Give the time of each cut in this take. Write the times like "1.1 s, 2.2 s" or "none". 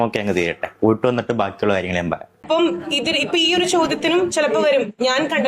2.3 s